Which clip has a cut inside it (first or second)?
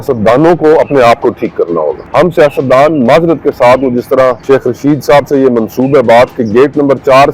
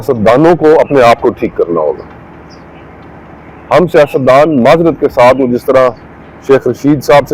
first